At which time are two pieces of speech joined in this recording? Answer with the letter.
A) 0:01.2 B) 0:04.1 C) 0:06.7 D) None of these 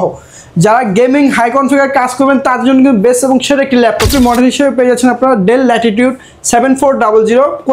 B